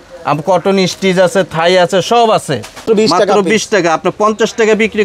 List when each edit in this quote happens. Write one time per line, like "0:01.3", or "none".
0:02.8

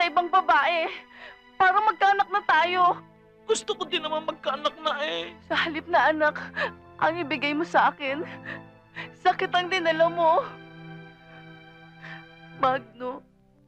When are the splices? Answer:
0:05.3

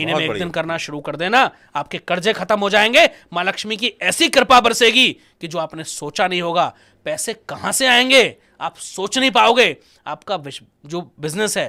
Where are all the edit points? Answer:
none

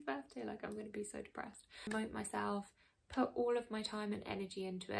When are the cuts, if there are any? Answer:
0:01.9

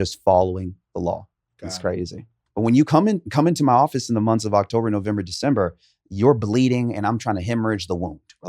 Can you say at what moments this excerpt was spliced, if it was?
0:02.4

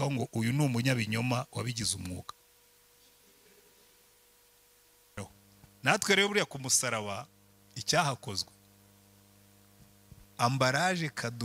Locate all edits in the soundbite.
0:05.2

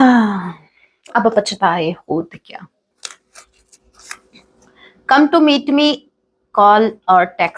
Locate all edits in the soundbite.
0:02.9

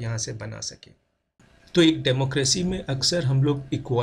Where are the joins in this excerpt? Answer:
0:01.4

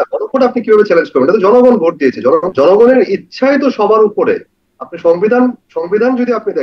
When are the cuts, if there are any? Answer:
0:02.5

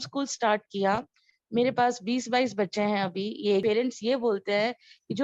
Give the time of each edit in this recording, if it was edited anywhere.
0:03.6

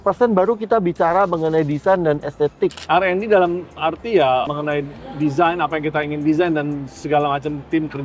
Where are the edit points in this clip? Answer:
0:02.8

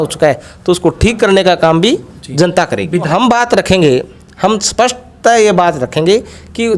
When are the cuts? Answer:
0:03.1

